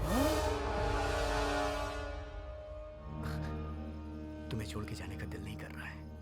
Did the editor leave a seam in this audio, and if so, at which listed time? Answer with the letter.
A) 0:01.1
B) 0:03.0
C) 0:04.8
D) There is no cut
B